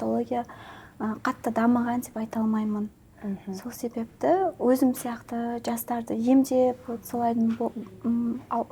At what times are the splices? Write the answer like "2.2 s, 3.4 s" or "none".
none